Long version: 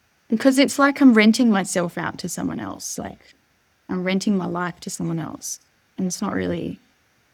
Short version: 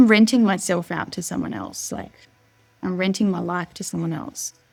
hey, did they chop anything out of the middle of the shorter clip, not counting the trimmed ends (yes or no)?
no